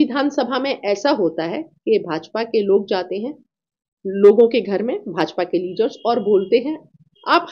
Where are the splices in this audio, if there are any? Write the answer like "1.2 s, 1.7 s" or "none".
none